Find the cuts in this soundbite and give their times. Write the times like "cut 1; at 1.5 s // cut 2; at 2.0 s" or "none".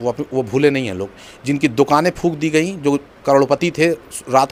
none